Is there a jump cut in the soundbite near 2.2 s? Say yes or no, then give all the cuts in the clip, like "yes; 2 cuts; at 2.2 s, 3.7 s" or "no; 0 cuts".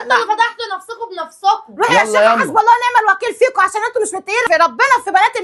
no; 1 cut; at 4.4 s